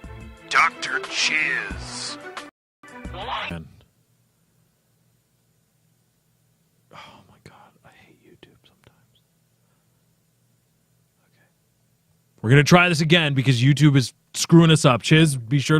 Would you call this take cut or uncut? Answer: cut